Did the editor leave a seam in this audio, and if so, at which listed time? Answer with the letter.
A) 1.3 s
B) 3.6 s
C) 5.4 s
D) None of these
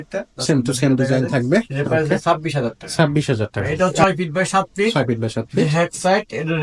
B